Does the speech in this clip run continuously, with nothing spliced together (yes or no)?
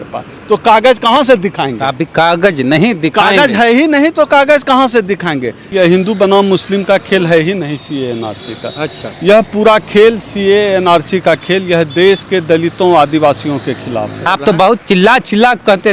no